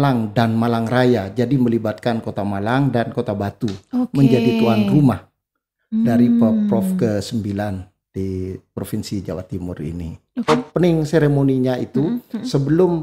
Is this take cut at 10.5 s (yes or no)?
yes